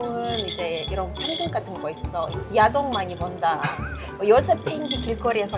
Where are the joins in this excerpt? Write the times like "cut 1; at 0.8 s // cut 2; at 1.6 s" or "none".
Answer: none

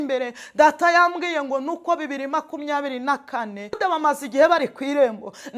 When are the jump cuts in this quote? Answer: cut 1; at 3.8 s

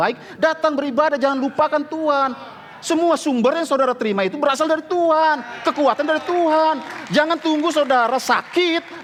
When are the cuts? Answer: none

